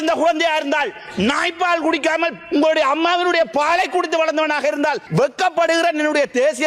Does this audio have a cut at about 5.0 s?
yes; 1 cut; at 5.0 s

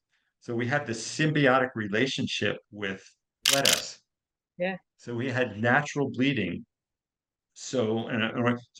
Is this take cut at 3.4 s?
yes; 1 cut; at 3.4 s

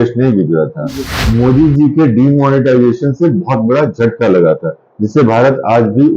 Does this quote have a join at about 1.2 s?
yes; 1 cut; at 1.2 s

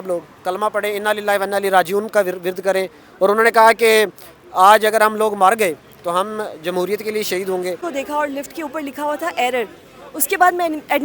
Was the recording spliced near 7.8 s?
yes; 1 cut; at 7.8 s

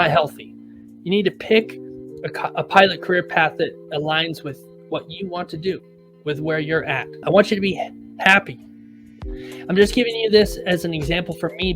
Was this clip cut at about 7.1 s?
yes; 1 cut; at 7.1 s

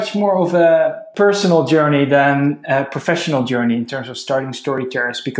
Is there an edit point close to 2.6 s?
no; 1 cut; at 1.0 s

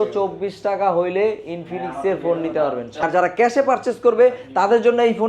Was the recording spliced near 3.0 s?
yes; 1 cut; at 3.0 s

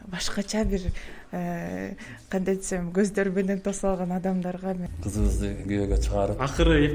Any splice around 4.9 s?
yes; 1 cut; at 4.9 s

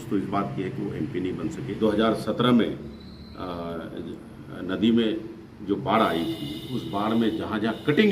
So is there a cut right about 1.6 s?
yes; 1 cut; at 1.6 s

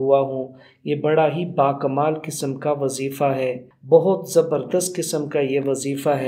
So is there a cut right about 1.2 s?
no; 1 cut; at 3.7 s

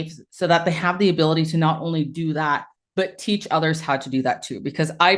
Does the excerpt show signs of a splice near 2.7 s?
no; 0 cuts

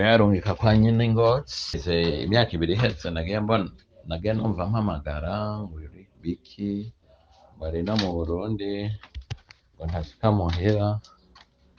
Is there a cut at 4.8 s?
no; 1 cut; at 1.8 s

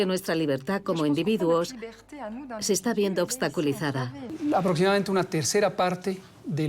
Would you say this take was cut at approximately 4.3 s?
yes; 1 cut; at 4.3 s

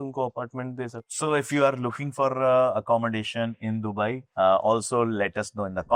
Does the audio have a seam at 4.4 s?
no; 0 cuts

